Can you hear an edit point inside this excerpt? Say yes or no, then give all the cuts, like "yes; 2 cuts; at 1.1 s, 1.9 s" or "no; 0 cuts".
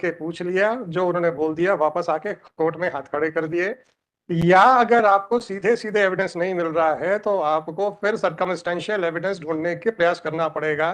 no; 0 cuts